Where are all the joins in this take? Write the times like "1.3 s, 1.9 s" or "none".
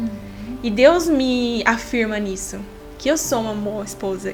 none